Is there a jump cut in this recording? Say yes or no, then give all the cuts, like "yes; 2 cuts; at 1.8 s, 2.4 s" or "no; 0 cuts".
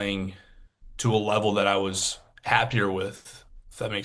no; 0 cuts